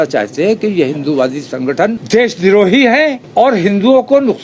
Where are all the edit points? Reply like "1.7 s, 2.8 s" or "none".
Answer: 2.0 s, 3.2 s